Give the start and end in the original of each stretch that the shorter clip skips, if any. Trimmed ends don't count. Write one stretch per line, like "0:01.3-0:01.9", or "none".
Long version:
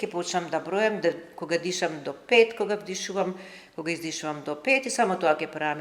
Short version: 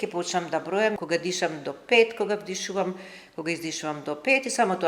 0:01.0-0:01.4